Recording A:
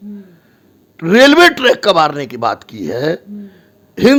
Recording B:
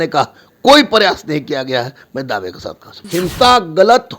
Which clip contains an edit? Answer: B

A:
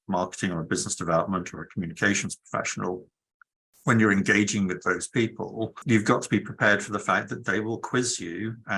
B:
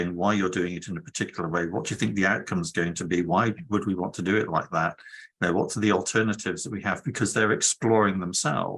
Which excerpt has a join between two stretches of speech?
A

